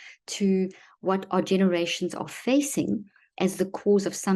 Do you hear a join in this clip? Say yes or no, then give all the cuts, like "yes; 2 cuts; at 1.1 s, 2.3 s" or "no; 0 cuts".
no; 0 cuts